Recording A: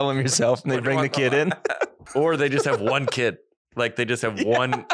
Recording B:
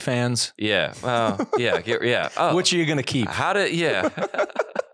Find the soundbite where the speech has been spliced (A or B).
A